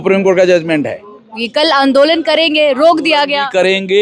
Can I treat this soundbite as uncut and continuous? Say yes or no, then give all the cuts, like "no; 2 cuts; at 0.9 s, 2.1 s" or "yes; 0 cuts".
no; 1 cut; at 1.4 s